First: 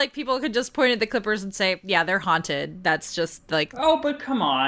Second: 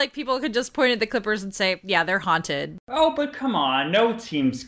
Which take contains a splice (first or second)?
second